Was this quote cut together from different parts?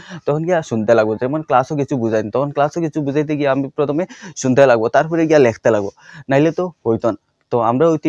no; 0 cuts

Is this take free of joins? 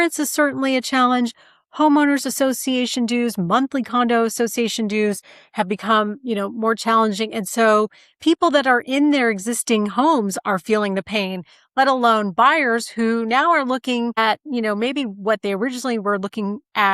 no; 1 cut; at 14.2 s

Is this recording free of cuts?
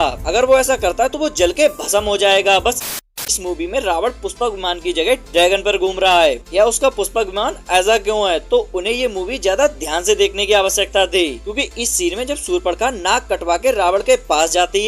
no; 1 cut; at 3.1 s

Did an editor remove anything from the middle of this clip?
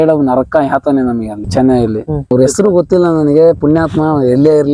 yes; 1 cut; at 2.3 s

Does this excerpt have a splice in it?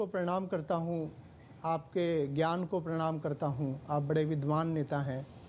no; 0 cuts

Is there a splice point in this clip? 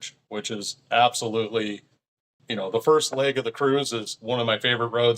yes; 2 cuts; at 2.4 s, 4.1 s

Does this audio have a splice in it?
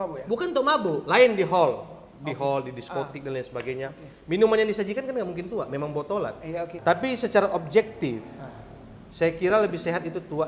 yes; 1 cut; at 6.7 s

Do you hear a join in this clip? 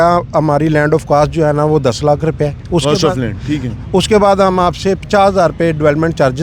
no; 0 cuts

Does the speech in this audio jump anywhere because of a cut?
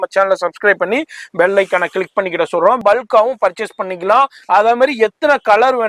yes; 1 cut; at 2.8 s

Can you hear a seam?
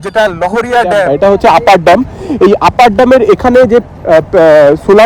yes; 1 cut; at 1.1 s

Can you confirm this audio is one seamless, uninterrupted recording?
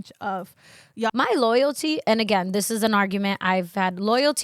no; 1 cut; at 1.1 s

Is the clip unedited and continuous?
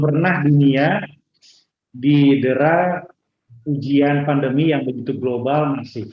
yes; 0 cuts

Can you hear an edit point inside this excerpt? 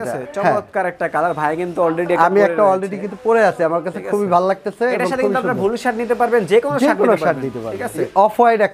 no; 0 cuts

